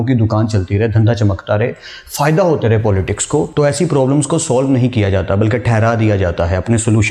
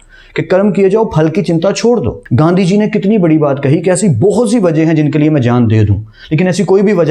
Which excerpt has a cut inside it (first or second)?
second